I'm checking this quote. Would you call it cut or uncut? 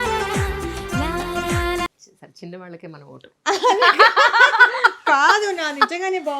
cut